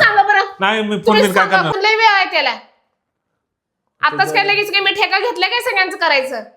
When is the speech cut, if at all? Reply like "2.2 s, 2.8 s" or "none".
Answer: 1.7 s